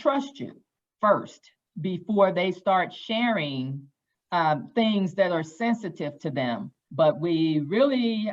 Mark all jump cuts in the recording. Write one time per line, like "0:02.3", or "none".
0:06.8